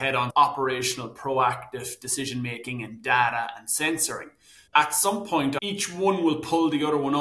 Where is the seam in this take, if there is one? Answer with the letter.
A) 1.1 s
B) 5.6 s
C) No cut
B